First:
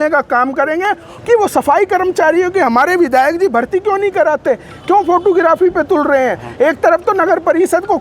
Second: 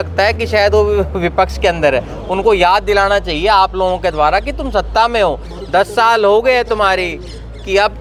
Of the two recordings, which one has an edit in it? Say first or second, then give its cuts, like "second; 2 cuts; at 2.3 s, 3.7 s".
first; 1 cut; at 1.1 s